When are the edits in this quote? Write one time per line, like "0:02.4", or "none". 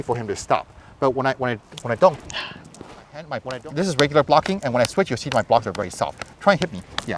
0:03.3